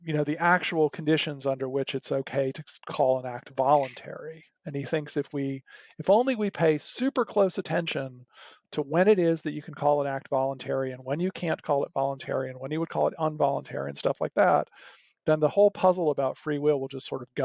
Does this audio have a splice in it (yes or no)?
no